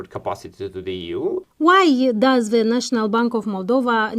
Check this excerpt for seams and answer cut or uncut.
cut